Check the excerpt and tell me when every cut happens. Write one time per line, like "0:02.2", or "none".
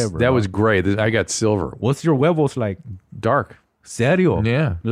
0:01.7